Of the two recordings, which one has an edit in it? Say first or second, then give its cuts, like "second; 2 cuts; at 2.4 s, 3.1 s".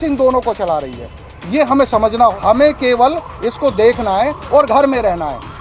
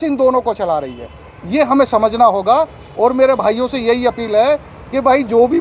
first; 1 cut; at 2.4 s